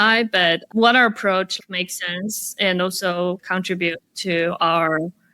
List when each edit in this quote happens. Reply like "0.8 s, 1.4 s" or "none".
1.5 s, 3.4 s